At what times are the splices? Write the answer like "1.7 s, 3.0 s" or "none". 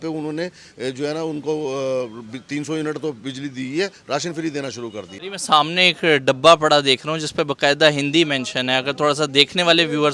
5.2 s